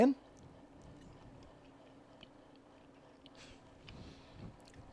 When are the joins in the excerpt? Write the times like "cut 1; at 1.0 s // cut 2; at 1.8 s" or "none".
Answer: cut 1; at 2.0 s